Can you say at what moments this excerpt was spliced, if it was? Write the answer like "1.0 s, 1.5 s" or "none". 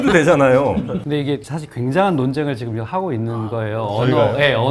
1.0 s